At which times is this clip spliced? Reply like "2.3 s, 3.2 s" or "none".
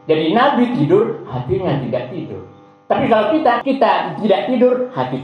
3.6 s